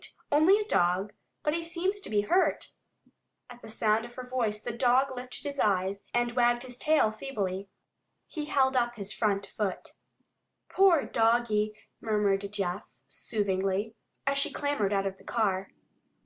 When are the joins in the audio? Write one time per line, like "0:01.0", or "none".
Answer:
0:04.3